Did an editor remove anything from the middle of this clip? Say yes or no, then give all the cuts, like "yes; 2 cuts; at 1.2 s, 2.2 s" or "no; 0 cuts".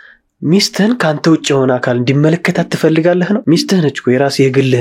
yes; 1 cut; at 3.4 s